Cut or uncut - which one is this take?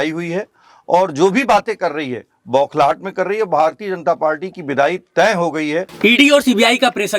cut